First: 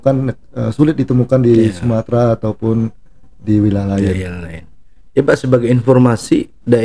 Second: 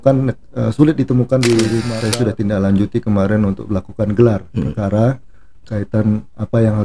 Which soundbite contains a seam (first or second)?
second